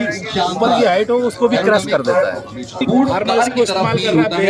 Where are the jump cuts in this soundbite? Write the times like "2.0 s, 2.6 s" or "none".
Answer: 2.8 s